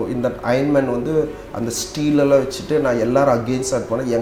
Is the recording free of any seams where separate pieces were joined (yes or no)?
yes